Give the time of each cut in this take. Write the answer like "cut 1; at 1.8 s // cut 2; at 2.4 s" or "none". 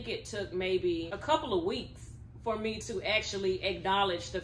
cut 1; at 1.1 s